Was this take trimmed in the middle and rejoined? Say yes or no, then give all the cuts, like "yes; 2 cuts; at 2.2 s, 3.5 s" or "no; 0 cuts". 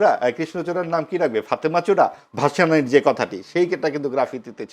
no; 0 cuts